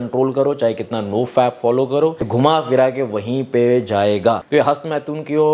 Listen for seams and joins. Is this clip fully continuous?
no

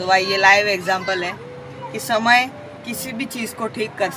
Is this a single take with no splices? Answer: yes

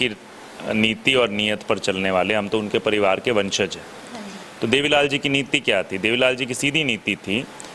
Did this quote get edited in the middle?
no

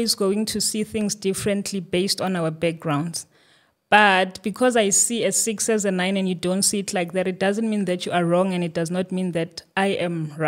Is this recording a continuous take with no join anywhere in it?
yes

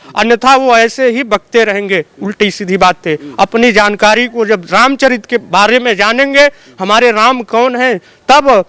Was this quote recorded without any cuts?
yes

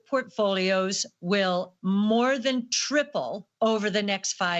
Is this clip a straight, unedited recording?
yes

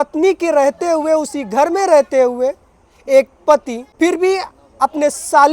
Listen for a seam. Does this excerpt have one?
yes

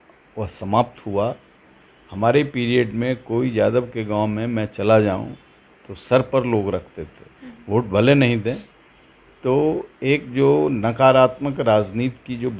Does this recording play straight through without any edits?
yes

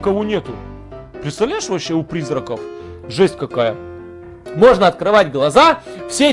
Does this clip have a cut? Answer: no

